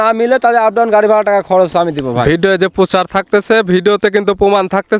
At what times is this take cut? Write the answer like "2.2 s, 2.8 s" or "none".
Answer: none